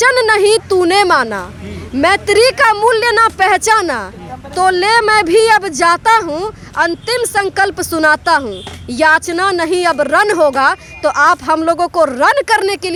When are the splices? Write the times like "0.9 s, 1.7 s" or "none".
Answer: none